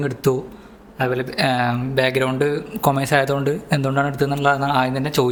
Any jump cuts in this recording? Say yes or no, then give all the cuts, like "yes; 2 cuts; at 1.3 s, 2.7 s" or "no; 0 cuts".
no; 0 cuts